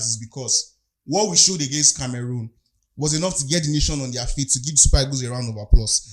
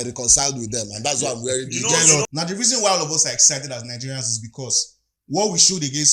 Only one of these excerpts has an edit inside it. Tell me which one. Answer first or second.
second